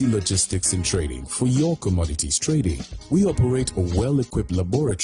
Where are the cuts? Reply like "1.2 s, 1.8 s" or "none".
2.9 s

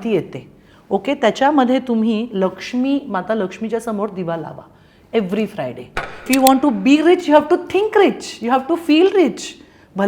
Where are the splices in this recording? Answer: 6.1 s

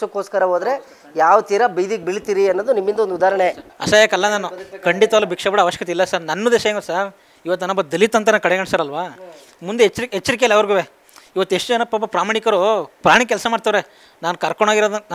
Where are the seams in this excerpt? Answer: 3.7 s

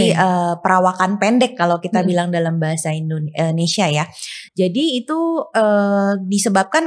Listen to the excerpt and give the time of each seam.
none

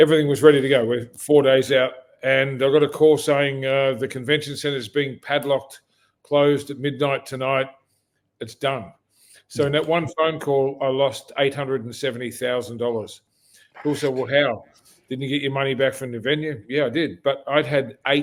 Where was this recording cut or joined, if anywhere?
none

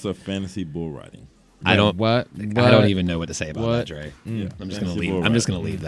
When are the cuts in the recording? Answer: 4.6 s

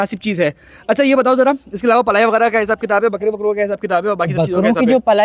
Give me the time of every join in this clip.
none

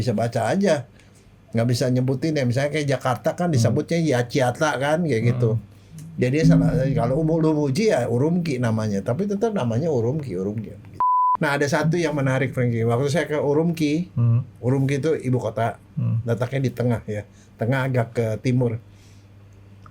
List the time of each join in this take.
11.2 s

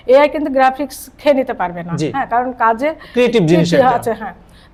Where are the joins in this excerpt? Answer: none

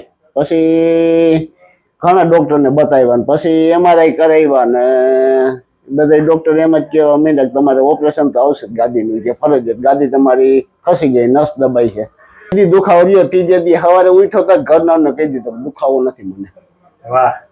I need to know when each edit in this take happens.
12.5 s

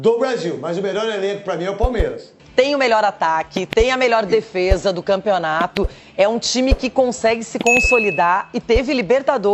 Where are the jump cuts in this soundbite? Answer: 2.3 s

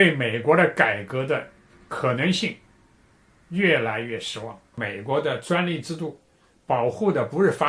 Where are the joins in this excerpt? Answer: 4.8 s

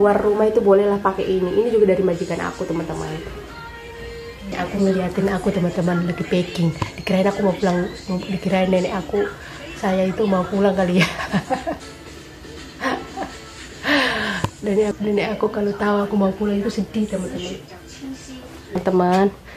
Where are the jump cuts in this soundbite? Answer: 4.5 s, 14.9 s, 18.8 s

